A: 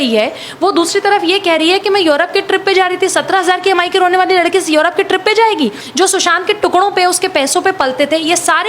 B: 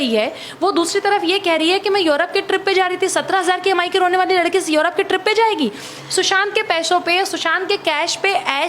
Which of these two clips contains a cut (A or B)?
A